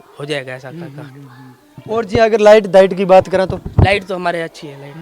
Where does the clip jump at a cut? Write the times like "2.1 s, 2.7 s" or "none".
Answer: none